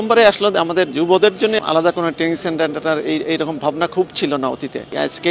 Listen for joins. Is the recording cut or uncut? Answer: cut